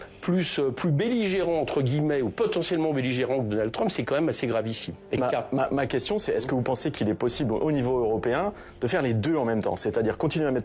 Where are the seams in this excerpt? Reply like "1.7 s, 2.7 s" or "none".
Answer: 5.2 s